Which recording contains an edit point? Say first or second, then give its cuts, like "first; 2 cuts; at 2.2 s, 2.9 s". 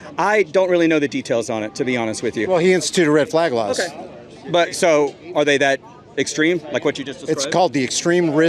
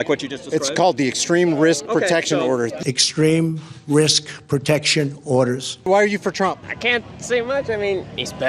second; 3 cuts; at 2.8 s, 5.7 s, 6.7 s